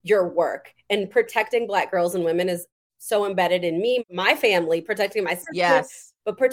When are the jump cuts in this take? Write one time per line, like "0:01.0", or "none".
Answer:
0:04.1